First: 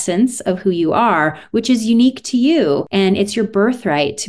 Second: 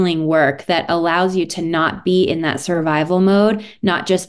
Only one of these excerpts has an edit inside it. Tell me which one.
first; 1 cut; at 2.9 s

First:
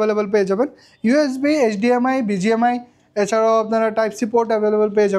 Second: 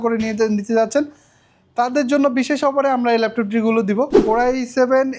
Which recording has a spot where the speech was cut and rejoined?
second; 1 cut; at 4.2 s

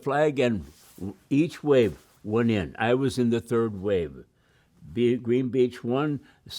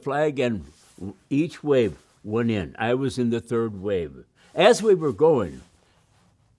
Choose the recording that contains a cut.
second; 1 cut; at 4.4 s

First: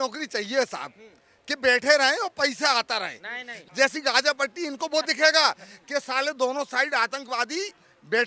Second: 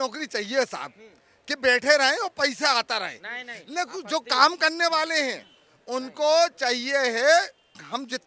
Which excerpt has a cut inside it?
first; 1 cut; at 3.6 s

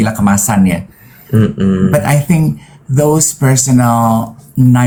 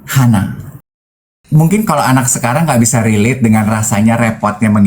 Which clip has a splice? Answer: second; 1 cut; at 1.3 s

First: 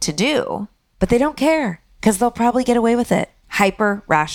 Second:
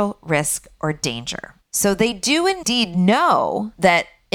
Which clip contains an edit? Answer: second; 1 cut; at 2.6 s

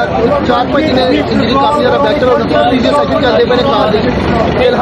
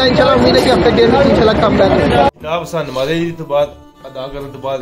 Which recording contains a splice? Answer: second; 1 cut; at 2.4 s

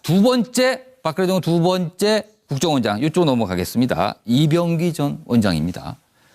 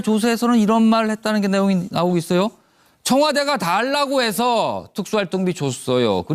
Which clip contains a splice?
first; 1 cut; at 3.9 s

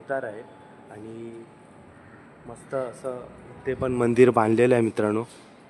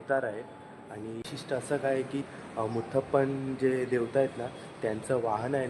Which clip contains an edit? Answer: second; 1 cut; at 1.3 s

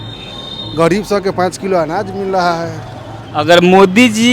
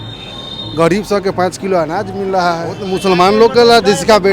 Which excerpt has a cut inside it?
second; 1 cut; at 2.9 s

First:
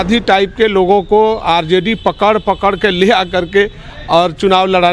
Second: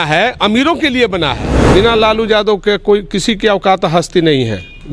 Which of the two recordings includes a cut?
second; 1 cut; at 1.7 s

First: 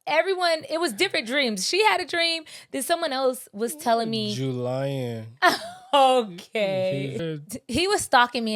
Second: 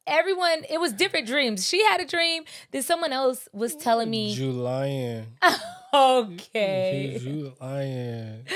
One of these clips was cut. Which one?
first; 1 cut; at 7.2 s

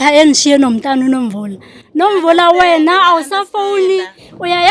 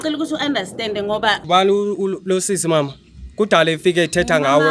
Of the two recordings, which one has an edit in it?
second; 1 cut; at 1.4 s

